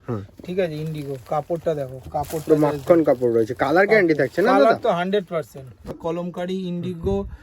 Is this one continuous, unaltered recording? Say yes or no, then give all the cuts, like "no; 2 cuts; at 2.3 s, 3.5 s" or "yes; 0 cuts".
no; 1 cut; at 6.0 s